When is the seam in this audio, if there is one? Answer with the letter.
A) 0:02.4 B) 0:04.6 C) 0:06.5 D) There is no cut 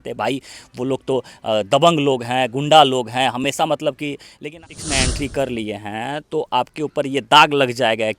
B